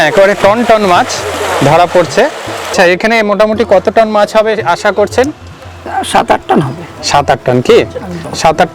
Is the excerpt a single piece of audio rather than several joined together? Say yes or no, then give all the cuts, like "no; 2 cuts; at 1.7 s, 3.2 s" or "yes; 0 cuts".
no; 1 cut; at 2.7 s